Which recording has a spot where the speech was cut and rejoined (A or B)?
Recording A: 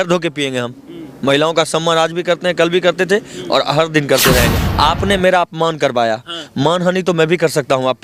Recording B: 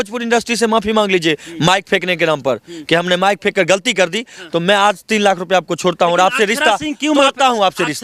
A